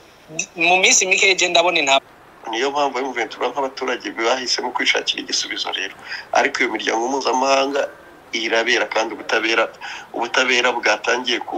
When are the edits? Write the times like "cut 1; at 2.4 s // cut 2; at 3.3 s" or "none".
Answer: cut 1; at 2.0 s

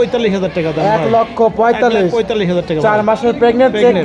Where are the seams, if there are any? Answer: none

